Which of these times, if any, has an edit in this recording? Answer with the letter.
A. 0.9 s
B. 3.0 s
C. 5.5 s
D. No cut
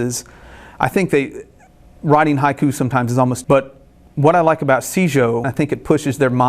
C